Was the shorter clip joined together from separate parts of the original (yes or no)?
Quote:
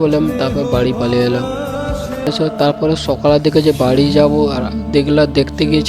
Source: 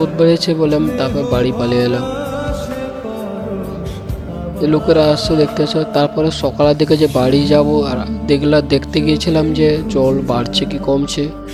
yes